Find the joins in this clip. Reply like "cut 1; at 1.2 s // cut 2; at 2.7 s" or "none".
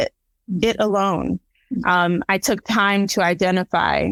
none